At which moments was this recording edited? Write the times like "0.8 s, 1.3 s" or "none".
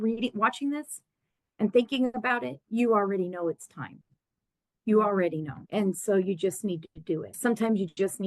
5.6 s, 7.3 s

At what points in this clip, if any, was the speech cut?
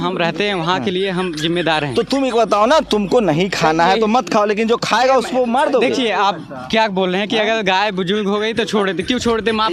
none

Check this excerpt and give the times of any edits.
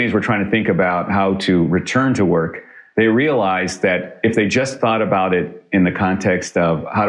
4.1 s

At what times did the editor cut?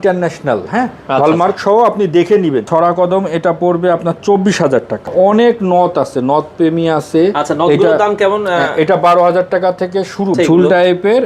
2.6 s, 5.1 s, 10.3 s

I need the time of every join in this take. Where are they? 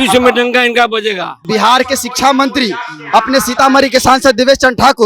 1.4 s

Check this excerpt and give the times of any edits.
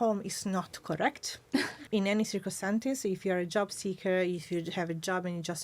1.8 s

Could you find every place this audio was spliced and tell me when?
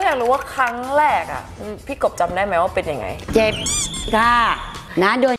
none

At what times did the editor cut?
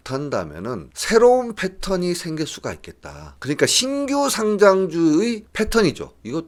none

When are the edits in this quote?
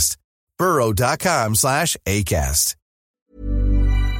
3.1 s

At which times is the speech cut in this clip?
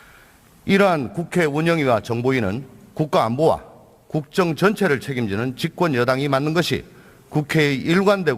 1.6 s

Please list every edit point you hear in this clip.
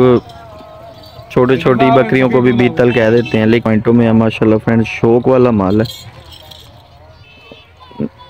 3.6 s

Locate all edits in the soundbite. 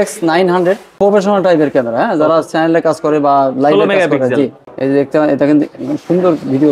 0.9 s, 4.7 s

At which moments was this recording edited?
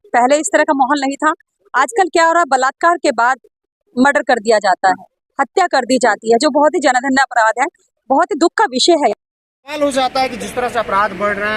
9.7 s

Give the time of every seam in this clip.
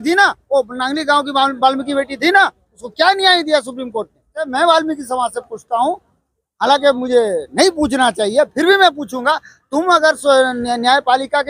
4.2 s

